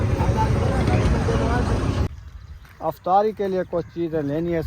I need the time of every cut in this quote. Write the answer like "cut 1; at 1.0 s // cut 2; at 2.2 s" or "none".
cut 1; at 2.4 s